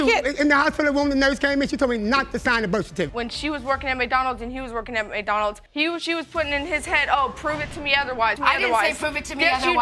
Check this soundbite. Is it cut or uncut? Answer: cut